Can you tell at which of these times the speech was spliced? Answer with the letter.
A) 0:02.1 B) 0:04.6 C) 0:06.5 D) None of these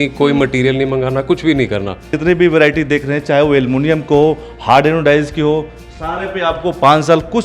A